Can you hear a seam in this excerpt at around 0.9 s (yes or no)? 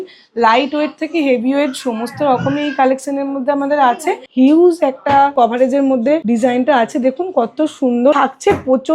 no